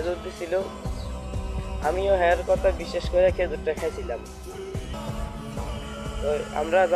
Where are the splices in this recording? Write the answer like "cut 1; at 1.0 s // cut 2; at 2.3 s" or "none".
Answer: cut 1; at 5.0 s